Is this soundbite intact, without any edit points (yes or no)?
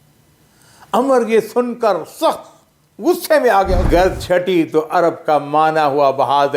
no